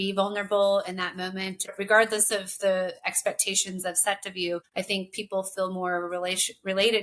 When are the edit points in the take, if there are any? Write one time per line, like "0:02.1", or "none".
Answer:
0:01.7
0:04.7